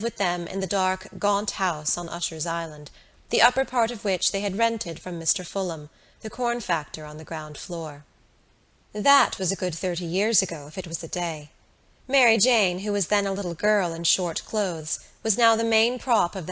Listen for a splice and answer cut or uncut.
uncut